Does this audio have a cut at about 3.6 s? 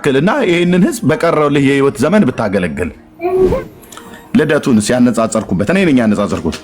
yes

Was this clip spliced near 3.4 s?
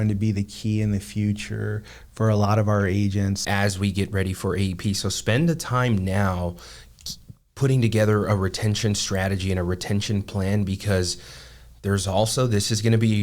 yes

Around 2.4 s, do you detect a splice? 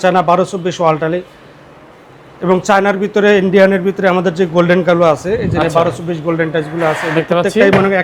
no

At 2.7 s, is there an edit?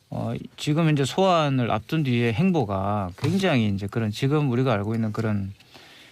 yes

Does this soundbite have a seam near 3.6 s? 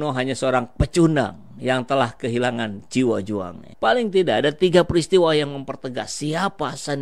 yes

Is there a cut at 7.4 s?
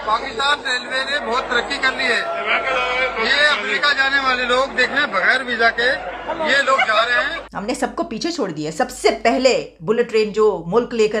yes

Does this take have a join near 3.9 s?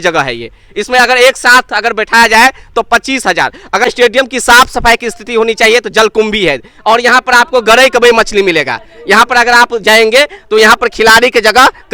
yes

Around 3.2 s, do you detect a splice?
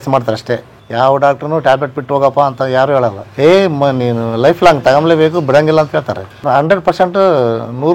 yes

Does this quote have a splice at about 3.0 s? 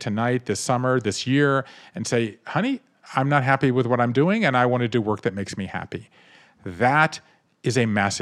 yes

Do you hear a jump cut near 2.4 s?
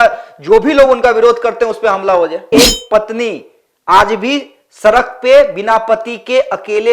yes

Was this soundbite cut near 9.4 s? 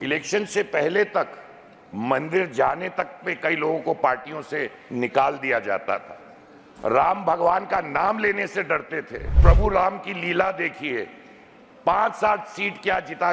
yes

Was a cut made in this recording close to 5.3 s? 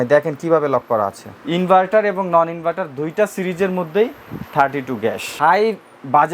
yes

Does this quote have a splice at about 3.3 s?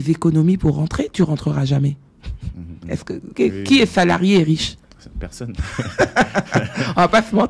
yes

